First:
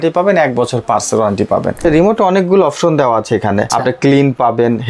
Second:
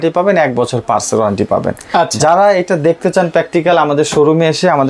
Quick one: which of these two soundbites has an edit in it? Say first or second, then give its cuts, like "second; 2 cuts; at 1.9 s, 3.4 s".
first; 2 cuts; at 1.8 s, 3.7 s